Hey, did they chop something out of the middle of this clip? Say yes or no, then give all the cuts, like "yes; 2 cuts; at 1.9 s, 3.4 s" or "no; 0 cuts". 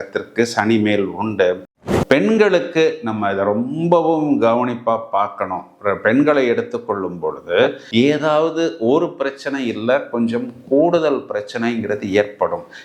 yes; 2 cuts; at 1.6 s, 7.8 s